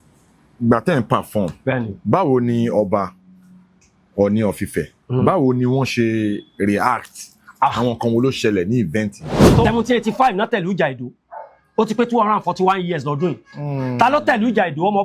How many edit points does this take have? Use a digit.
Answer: 1